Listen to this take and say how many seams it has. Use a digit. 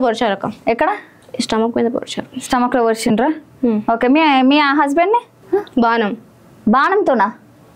1